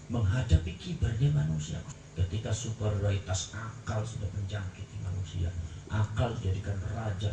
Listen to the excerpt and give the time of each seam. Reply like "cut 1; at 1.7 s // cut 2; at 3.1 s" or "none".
cut 1; at 1.9 s